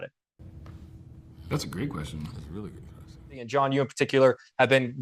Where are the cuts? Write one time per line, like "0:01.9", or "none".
0:03.4